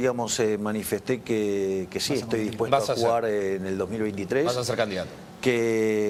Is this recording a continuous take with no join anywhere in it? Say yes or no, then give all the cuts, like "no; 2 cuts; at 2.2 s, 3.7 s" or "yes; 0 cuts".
yes; 0 cuts